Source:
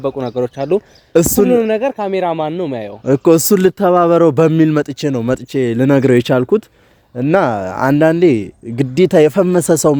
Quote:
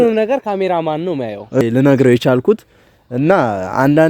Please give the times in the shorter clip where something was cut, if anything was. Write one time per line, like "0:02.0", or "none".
0:01.6

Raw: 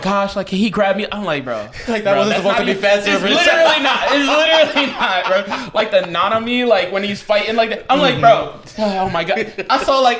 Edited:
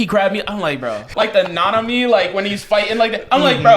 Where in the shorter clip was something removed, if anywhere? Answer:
0:01.0

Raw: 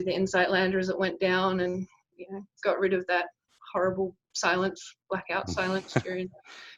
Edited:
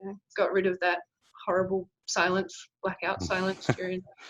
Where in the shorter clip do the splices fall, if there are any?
none

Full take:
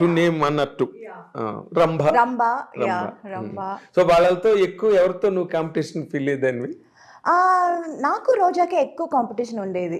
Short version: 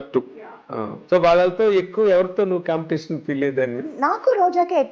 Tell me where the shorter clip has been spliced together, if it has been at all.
0:01.0
0:03.9

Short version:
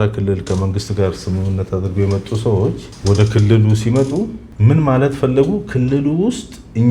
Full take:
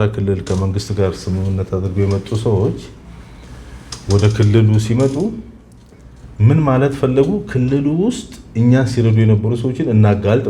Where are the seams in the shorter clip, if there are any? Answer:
0:02.9
0:04.5

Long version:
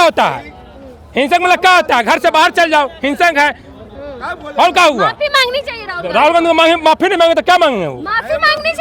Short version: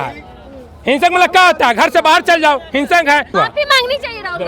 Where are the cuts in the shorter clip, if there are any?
0:03.3

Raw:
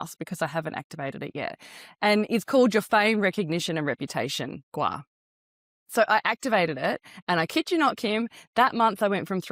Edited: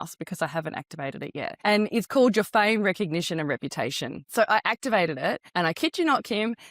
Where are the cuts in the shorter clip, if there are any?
0:01.5
0:04.2
0:05.4

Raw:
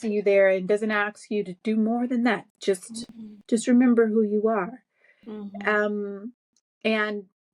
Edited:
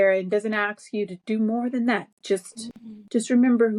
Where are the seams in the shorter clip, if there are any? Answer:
none

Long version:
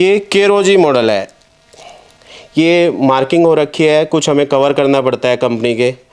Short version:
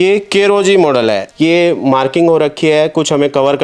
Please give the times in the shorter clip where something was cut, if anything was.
0:01.3

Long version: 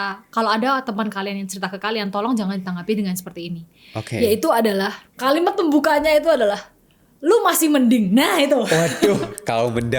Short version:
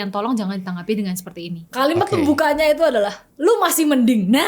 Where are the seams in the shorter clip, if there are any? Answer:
0:01.6
0:03.2

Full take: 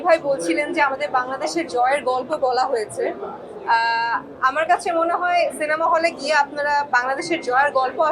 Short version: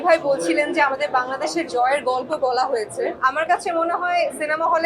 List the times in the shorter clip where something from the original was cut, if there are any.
0:03.2

